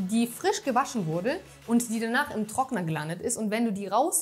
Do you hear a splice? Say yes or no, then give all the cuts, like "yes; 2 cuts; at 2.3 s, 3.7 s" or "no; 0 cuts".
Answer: no; 0 cuts